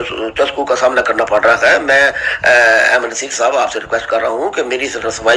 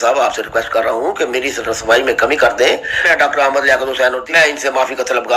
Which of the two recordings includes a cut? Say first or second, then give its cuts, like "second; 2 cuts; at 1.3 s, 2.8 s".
second; 2 cuts; at 3.1 s, 4.2 s